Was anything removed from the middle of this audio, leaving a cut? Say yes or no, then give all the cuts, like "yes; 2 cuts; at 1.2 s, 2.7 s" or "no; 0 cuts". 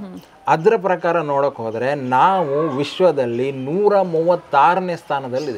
no; 0 cuts